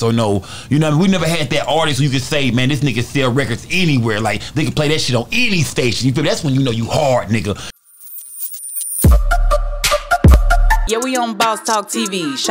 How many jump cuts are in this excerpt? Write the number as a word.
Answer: one